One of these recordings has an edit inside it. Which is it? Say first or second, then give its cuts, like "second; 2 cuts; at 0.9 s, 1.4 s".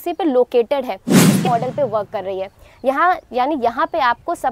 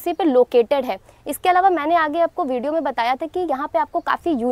first; 1 cut; at 1.4 s